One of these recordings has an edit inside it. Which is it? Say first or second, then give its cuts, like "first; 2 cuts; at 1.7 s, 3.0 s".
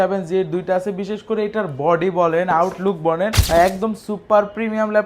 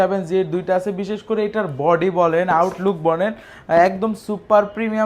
first; 1 cut; at 3.4 s